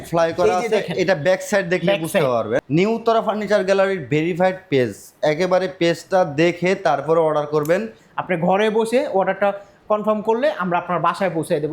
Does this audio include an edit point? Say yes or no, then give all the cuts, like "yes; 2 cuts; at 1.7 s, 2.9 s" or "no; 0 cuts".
yes; 2 cuts; at 2.6 s, 8.0 s